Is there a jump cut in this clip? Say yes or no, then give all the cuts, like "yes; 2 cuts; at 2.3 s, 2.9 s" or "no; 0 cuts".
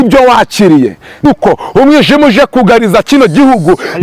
yes; 1 cut; at 1.2 s